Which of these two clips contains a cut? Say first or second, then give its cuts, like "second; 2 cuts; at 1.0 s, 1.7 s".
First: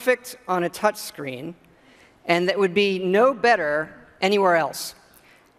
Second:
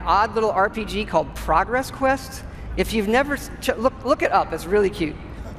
first; 1 cut; at 2.8 s